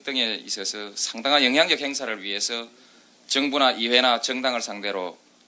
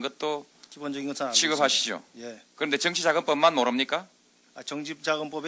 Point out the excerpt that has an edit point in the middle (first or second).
first